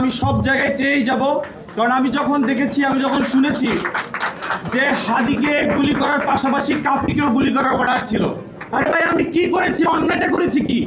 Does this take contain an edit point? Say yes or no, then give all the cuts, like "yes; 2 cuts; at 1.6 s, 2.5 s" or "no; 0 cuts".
no; 0 cuts